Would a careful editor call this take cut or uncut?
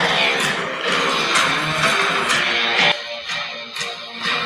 uncut